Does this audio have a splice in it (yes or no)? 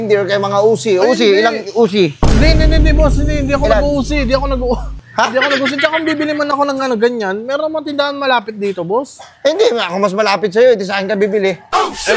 no